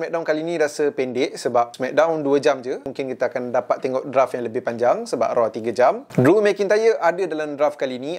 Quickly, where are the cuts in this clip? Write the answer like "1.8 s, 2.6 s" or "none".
1.8 s, 2.9 s, 6.0 s